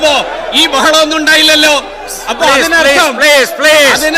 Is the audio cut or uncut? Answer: uncut